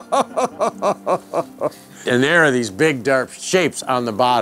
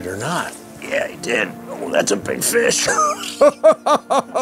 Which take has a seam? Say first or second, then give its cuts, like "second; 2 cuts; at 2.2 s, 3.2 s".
first; 2 cuts; at 2.0 s, 3.4 s